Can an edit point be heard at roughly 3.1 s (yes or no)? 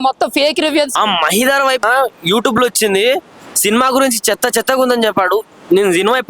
no